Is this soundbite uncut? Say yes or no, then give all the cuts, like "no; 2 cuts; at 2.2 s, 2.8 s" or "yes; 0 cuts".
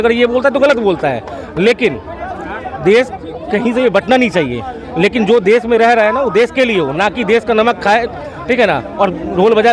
yes; 0 cuts